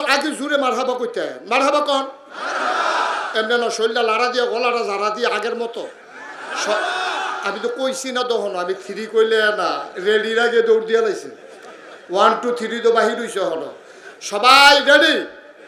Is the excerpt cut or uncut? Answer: uncut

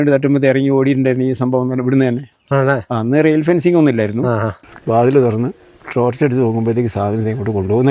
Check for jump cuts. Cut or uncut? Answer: cut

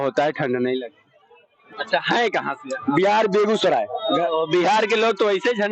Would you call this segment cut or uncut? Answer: cut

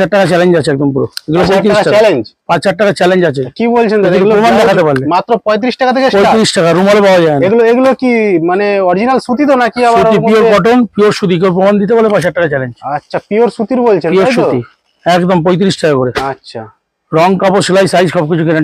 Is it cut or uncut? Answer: uncut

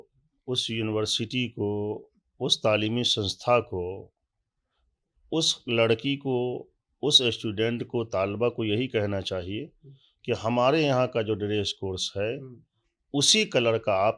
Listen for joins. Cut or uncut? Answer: uncut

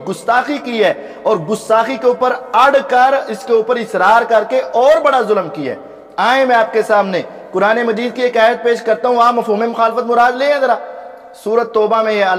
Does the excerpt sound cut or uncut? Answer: uncut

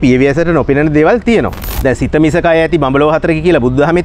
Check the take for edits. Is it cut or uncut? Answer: cut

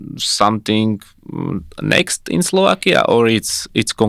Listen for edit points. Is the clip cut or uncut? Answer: uncut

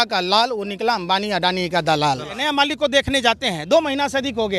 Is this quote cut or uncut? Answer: cut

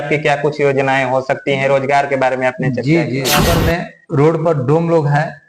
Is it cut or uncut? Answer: cut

